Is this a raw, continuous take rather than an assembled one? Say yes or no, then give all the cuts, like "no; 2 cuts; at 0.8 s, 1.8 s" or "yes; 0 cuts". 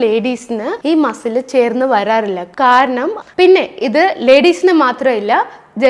no; 1 cut; at 3.2 s